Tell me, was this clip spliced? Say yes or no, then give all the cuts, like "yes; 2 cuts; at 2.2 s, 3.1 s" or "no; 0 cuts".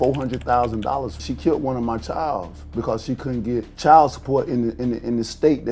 yes; 2 cuts; at 1.2 s, 3.7 s